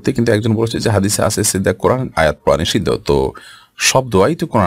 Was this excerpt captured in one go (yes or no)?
yes